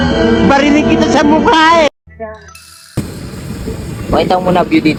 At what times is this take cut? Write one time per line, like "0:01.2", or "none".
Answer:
none